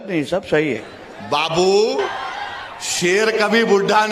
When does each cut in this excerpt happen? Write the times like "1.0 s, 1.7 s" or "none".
0.9 s, 2.2 s